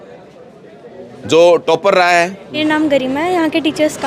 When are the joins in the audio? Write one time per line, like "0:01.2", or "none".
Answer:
0:02.6